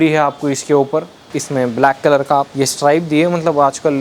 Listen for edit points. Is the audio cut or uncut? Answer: cut